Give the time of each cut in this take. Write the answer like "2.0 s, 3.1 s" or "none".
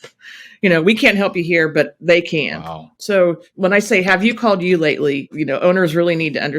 2.9 s, 3.5 s, 5.3 s